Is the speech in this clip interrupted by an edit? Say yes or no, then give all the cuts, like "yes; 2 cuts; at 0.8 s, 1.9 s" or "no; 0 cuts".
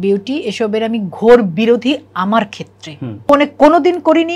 yes; 1 cut; at 3.3 s